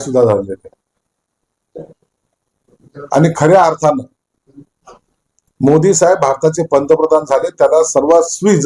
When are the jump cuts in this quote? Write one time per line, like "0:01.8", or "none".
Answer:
0:07.2